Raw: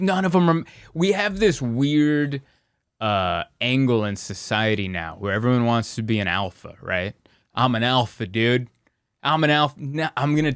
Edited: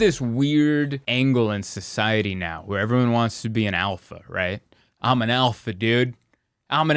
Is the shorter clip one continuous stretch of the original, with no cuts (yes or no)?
no